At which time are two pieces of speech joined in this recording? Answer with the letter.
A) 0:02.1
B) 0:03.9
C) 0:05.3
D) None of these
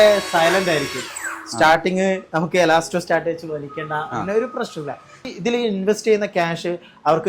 C